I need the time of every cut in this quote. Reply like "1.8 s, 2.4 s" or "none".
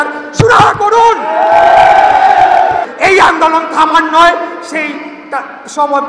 2.9 s